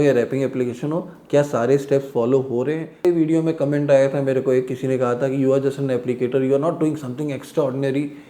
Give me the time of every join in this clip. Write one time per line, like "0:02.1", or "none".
0:03.1